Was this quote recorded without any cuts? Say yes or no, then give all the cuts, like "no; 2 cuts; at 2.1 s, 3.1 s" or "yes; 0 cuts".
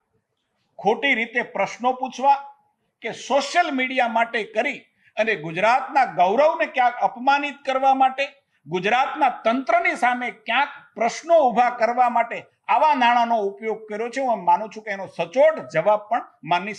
yes; 0 cuts